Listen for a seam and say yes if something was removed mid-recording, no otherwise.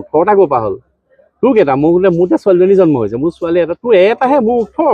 no